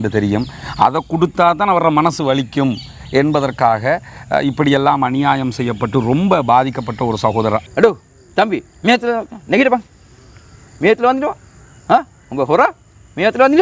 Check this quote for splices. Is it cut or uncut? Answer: cut